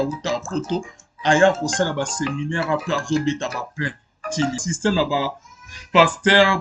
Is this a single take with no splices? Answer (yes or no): no